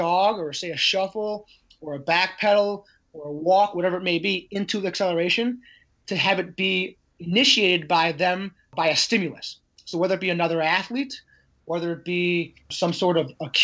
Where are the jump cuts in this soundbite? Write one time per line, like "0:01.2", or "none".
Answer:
0:08.7
0:12.6